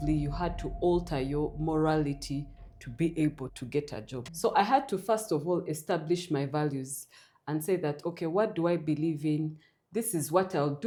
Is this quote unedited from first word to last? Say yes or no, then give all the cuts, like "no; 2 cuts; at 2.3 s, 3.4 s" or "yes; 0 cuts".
yes; 0 cuts